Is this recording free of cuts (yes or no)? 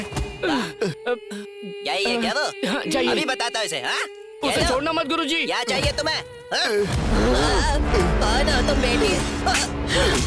yes